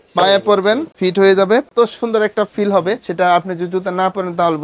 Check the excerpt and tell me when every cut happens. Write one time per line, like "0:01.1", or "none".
0:00.9
0:01.7